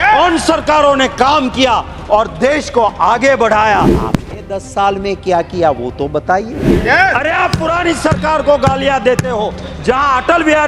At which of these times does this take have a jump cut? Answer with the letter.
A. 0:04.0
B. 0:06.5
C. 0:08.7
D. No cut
A